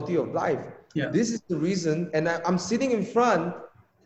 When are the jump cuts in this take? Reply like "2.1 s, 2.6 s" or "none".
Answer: none

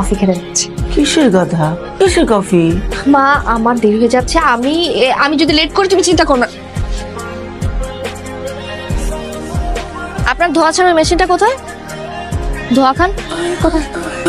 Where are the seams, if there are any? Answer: 1.1 s

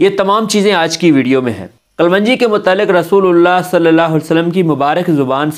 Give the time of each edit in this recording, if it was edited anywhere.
none

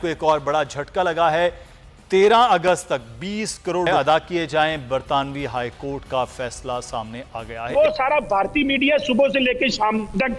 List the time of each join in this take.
3.9 s, 8.0 s

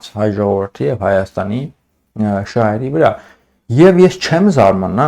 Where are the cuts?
none

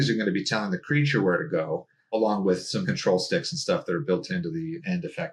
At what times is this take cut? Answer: none

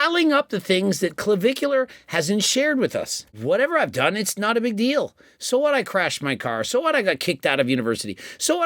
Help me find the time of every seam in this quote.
3.2 s

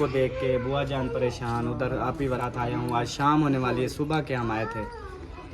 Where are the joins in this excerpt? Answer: 2.4 s

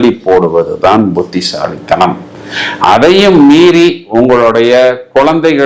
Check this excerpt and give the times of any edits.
none

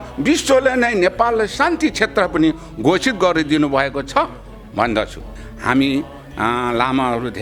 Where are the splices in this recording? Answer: 5.3 s

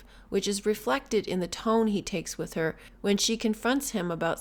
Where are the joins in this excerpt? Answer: none

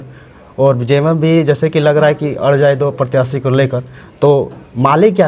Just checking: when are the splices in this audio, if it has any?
none

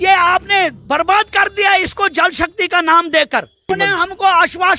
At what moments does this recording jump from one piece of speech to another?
3.7 s

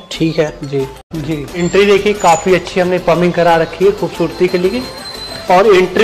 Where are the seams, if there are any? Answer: 1.1 s

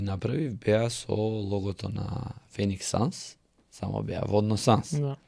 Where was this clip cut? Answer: none

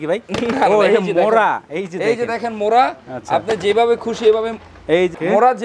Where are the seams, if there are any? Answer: none

